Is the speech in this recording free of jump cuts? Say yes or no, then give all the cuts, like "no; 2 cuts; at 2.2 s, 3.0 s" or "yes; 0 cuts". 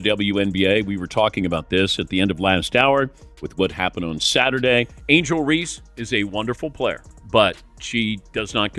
no; 2 cuts; at 5.0 s, 7.1 s